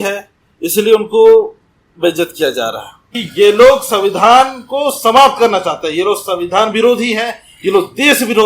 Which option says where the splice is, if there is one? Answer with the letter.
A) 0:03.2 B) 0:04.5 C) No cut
A